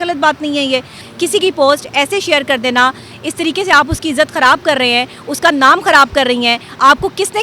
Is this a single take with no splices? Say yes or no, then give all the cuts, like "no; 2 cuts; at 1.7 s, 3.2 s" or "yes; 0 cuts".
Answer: no; 1 cut; at 1.0 s